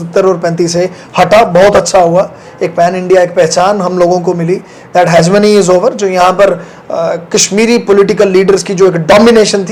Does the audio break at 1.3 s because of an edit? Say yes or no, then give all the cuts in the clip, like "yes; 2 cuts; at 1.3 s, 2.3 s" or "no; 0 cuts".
no; 0 cuts